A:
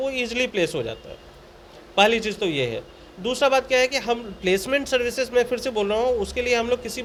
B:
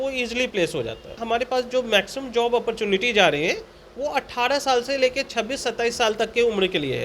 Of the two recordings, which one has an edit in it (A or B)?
B